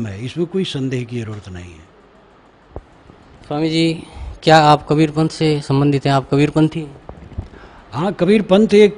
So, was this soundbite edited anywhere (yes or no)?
yes